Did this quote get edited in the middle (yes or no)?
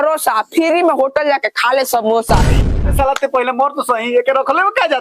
yes